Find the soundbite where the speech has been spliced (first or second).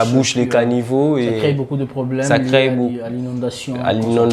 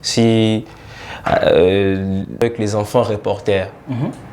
second